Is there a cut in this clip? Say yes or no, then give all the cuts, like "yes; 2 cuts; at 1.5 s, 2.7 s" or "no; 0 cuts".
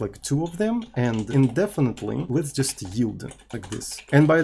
yes; 3 cuts; at 1.3 s, 2.2 s, 3.5 s